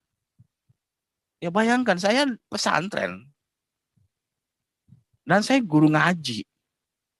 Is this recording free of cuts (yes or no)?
yes